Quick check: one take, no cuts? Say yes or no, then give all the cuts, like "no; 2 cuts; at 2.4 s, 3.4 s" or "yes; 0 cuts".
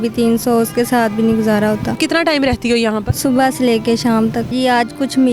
no; 3 cuts; at 2.0 s, 3.1 s, 4.5 s